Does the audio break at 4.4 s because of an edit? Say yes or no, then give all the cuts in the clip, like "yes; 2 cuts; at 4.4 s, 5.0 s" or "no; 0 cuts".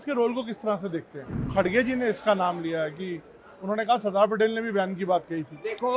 no; 1 cut; at 1.5 s